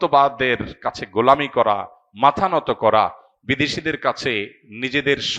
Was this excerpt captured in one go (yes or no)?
yes